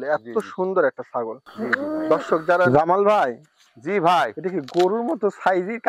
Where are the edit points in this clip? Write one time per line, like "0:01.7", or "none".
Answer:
0:02.7